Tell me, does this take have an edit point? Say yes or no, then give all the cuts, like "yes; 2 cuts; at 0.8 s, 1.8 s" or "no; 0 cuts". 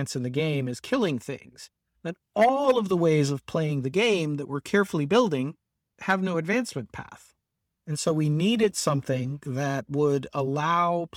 no; 0 cuts